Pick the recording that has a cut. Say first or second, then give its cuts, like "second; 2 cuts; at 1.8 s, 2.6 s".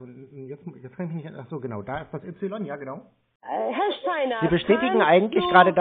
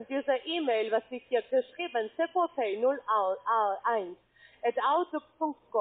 first; 1 cut; at 3.3 s